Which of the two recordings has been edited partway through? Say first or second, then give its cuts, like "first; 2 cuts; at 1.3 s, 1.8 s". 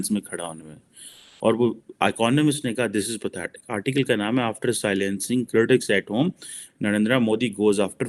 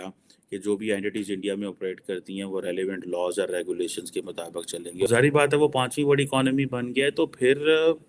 second; 1 cut; at 5.1 s